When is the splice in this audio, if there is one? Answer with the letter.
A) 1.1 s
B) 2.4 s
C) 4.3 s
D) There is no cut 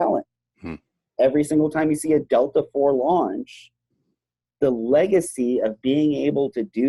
D